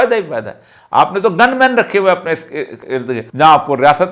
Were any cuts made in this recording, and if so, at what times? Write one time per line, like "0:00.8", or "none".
0:03.2